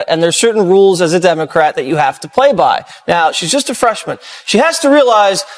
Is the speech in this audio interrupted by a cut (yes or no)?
no